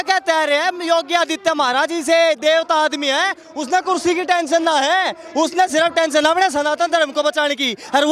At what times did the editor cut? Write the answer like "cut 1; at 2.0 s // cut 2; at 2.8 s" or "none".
none